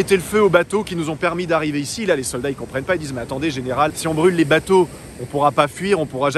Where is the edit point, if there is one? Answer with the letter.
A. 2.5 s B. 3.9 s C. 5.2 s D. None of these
D